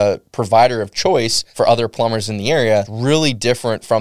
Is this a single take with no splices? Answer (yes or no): no